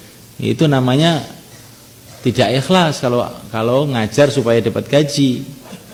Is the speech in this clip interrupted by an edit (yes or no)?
no